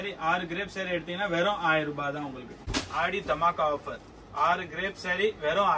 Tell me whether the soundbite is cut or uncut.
cut